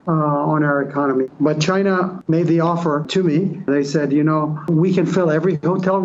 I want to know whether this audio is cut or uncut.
cut